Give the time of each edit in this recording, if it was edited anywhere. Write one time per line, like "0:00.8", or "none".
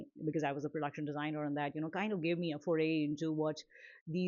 none